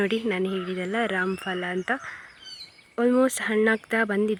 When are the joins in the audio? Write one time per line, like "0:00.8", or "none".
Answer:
none